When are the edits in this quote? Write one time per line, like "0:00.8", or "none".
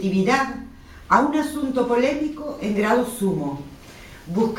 0:01.3